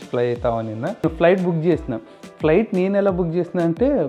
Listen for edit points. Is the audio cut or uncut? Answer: cut